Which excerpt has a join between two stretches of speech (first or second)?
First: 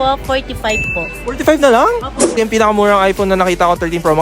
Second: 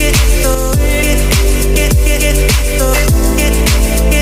first